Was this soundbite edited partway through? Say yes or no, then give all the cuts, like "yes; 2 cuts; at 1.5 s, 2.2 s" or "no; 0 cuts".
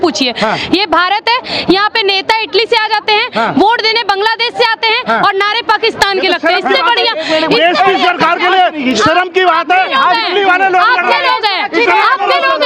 no; 0 cuts